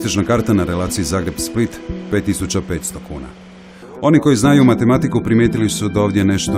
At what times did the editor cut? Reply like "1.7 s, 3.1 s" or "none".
none